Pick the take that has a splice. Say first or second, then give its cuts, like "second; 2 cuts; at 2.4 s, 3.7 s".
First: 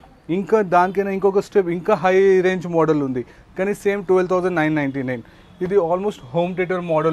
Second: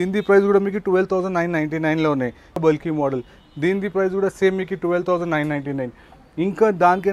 second; 1 cut; at 2.6 s